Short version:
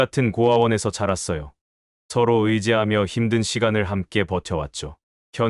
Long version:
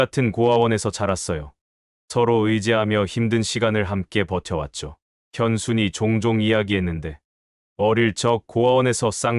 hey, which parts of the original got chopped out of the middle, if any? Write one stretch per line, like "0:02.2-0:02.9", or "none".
none